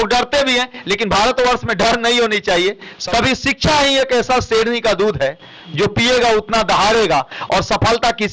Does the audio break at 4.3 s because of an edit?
no; 1 cut; at 2.9 s

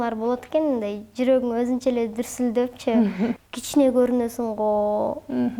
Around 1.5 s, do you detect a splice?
no; 1 cut; at 3.4 s

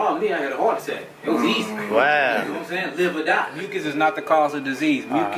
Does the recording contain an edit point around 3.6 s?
yes; 1 cut; at 3.6 s

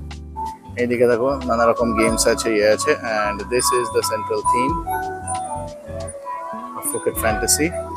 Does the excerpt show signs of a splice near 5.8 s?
no; 0 cuts

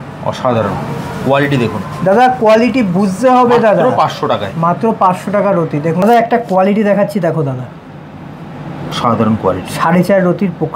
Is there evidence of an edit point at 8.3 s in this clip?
no; 1 cut; at 6.0 s

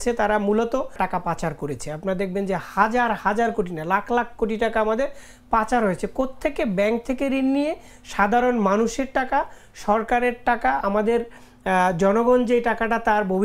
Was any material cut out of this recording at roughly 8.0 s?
no; 1 cut; at 0.9 s

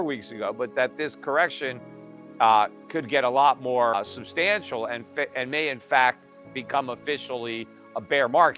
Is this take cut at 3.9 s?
yes; 1 cut; at 3.9 s

